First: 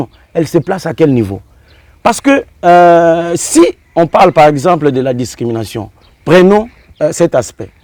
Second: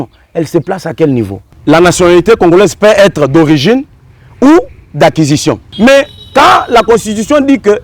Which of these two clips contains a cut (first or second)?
second